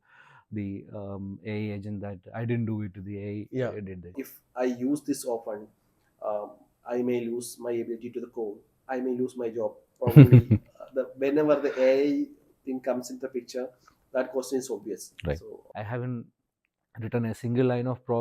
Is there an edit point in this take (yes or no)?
yes